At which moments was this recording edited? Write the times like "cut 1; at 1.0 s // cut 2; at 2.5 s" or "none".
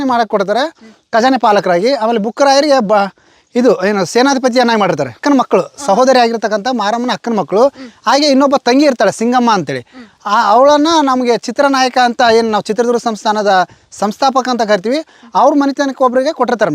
cut 1; at 5.1 s